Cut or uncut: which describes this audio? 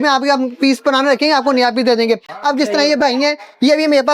uncut